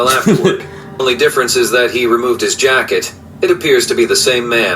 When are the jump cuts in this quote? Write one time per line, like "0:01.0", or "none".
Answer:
0:01.0